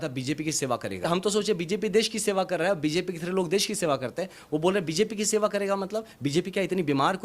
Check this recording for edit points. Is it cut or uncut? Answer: cut